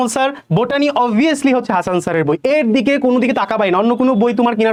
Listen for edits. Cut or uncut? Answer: uncut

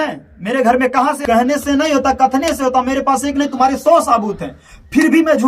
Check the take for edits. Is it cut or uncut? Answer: cut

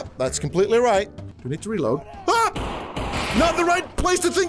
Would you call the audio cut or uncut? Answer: cut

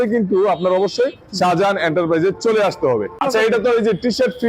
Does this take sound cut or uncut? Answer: cut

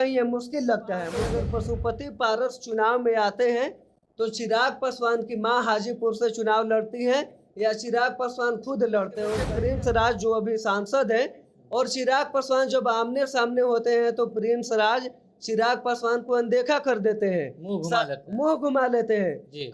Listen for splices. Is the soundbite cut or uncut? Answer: cut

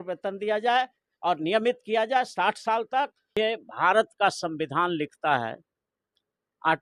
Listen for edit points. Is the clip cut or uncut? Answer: cut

